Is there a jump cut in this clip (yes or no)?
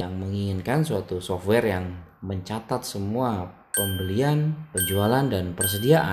no